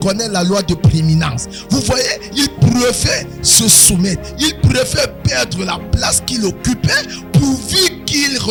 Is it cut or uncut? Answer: uncut